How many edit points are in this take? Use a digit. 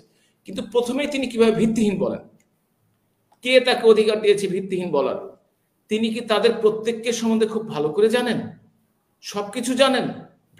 0